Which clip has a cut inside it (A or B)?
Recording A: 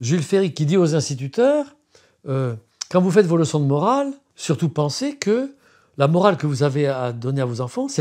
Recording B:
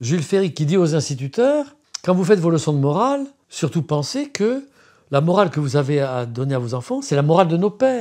B